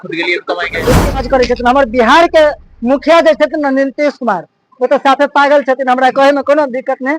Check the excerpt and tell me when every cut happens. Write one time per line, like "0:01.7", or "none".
0:01.2